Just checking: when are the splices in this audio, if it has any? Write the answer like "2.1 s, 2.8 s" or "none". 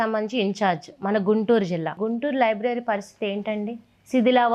1.9 s